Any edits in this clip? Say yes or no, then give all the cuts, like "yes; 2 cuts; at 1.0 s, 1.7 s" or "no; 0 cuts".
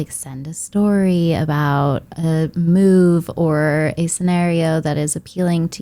no; 0 cuts